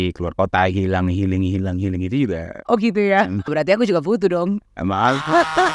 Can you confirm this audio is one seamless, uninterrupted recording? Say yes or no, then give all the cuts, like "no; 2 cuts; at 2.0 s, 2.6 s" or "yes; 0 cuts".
no; 1 cut; at 3.5 s